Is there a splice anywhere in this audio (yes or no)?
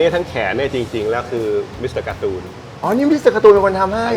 no